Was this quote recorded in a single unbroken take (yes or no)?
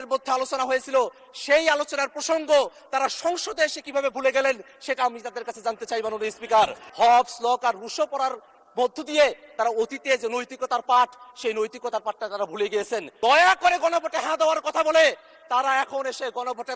no